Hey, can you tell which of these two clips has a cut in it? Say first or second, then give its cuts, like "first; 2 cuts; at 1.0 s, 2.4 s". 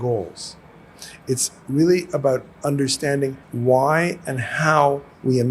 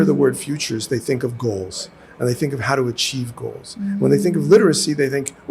first; 1 cut; at 3.5 s